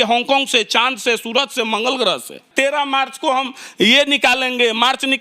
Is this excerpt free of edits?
no; 1 cut; at 2.4 s

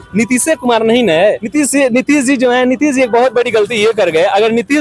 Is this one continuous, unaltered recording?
no; 1 cut; at 1.4 s

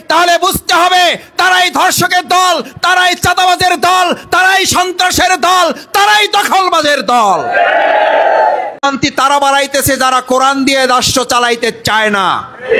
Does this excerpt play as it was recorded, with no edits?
no; 1 cut; at 8.8 s

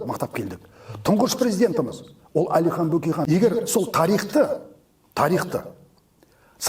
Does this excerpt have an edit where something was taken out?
yes; 1 cut; at 3.3 s

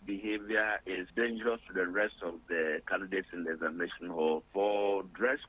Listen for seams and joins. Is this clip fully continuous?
no; 2 cuts; at 0.9 s, 4.5 s

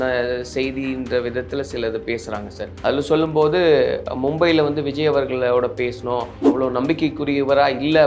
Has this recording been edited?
yes; 1 cut; at 6.4 s

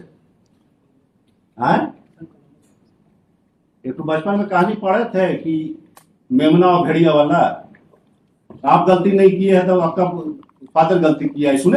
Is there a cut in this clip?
no; 0 cuts

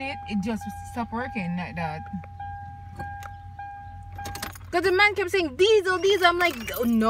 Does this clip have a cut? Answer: no; 0 cuts

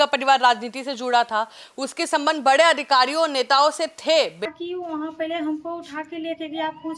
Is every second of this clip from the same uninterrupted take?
no; 1 cut; at 4.5 s

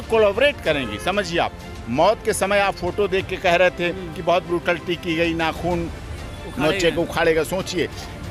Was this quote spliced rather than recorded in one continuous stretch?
no; 0 cuts

